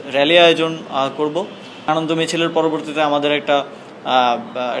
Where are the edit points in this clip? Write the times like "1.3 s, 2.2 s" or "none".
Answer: 1.9 s